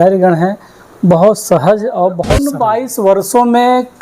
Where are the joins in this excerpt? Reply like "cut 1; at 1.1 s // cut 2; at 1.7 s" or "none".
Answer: cut 1; at 2.5 s